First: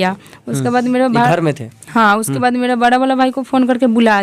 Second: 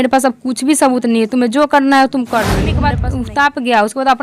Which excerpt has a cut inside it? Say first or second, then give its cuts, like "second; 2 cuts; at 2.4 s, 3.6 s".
second; 1 cut; at 2.8 s